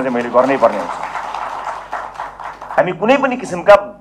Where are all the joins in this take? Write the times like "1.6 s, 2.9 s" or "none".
2.8 s